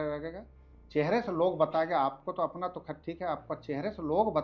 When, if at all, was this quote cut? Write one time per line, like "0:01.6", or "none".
none